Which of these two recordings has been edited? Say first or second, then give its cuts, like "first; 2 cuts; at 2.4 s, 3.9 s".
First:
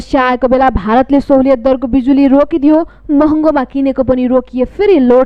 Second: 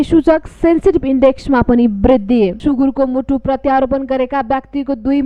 second; 1 cut; at 2.6 s